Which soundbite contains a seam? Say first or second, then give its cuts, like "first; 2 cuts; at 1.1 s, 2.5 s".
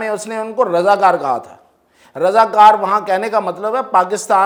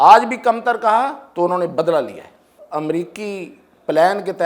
second; 1 cut; at 2.5 s